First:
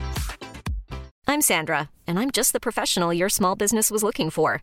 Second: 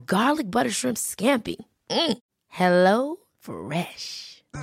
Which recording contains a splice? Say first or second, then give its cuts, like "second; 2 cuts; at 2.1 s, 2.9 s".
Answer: first; 1 cut; at 1.1 s